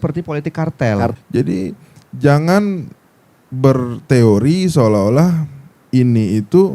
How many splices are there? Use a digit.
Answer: 1